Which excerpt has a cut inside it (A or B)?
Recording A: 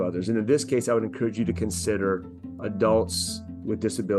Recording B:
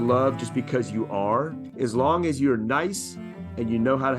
B